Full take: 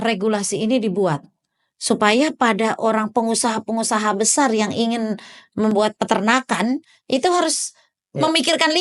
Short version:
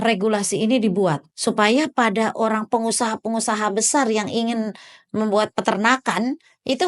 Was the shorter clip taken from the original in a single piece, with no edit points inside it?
no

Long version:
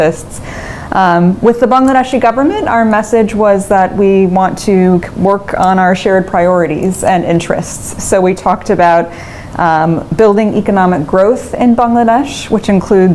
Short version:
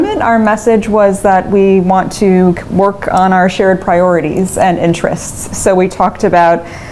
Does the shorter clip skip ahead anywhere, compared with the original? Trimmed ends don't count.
no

